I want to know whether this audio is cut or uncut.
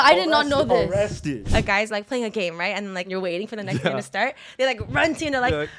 cut